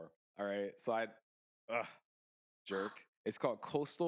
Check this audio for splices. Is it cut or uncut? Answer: cut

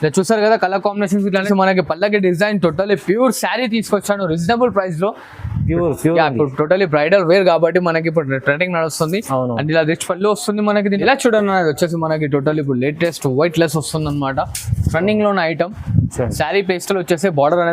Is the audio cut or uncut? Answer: cut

